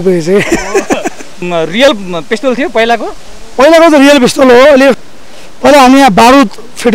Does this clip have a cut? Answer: yes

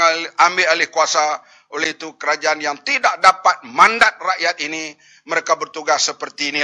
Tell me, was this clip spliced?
no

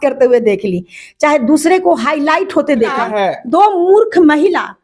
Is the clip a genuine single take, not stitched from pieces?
no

